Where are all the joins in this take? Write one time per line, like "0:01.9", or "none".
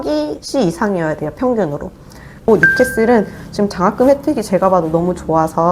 0:02.4